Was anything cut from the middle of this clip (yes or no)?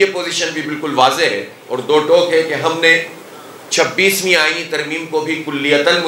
no